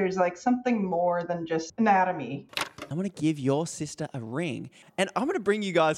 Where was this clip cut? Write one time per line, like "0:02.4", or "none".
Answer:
0:01.7
0:02.5
0:05.0